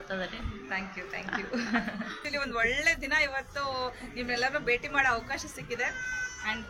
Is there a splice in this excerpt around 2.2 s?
yes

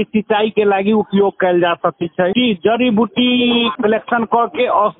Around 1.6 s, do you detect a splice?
no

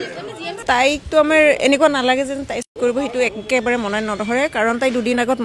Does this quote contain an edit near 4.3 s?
no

